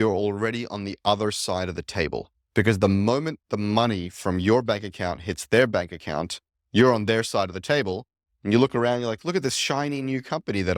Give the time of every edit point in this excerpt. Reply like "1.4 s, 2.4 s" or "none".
none